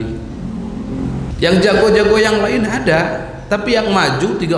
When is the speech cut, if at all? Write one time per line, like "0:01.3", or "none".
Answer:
0:01.3